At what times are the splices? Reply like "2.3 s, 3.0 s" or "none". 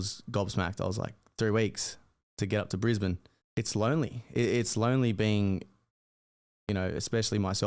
3.3 s